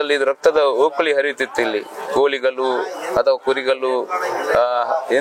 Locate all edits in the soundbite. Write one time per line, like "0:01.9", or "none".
none